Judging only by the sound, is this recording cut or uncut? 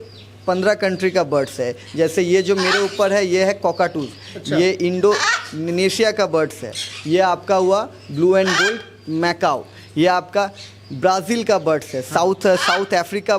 uncut